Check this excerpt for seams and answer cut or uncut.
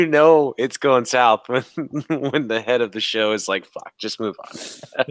uncut